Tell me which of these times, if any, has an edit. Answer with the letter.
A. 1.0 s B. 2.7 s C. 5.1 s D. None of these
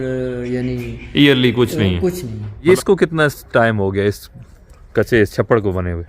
B